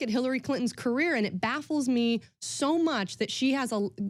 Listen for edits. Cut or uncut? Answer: uncut